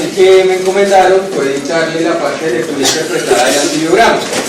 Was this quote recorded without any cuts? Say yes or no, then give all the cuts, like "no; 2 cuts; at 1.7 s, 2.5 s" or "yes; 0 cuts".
no; 1 cut; at 3.5 s